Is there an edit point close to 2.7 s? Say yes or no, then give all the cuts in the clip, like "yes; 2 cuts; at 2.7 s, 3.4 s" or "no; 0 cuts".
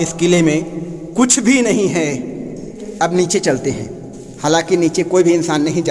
yes; 1 cut; at 2.7 s